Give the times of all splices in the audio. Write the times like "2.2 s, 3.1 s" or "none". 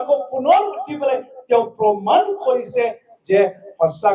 none